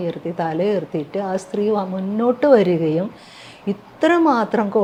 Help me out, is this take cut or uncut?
uncut